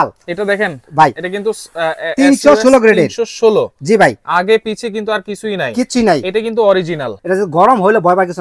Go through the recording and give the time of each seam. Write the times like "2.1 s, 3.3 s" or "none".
7.1 s